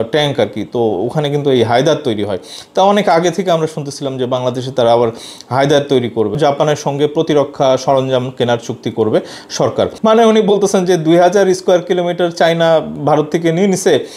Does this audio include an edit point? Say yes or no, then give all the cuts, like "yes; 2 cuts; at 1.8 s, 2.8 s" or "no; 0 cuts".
yes; 2 cuts; at 6.3 s, 9.9 s